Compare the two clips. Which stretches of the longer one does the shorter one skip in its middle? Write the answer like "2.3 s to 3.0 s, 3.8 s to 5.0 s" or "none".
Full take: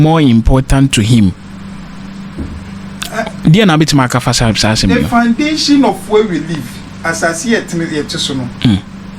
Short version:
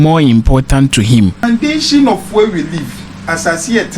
1.4 s to 5.2 s